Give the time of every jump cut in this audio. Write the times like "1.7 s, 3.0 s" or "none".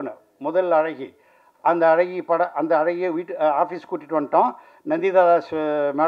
none

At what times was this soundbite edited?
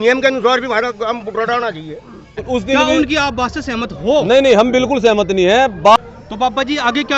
2.3 s, 6.0 s

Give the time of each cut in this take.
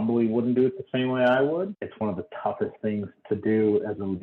1.7 s, 3.1 s

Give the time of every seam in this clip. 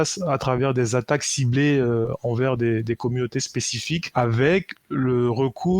4.1 s

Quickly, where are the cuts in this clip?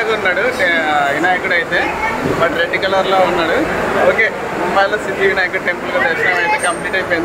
none

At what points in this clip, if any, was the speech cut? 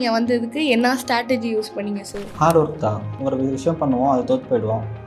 2.2 s, 3.2 s

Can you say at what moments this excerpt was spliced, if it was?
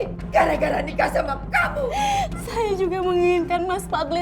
1.9 s

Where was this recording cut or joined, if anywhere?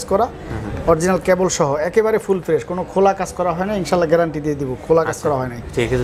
none

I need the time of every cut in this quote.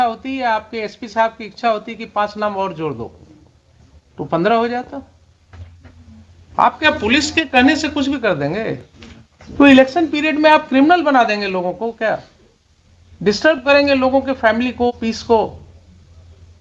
6.0 s, 9.5 s

